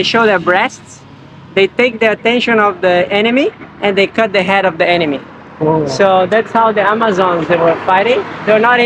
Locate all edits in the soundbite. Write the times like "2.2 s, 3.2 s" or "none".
none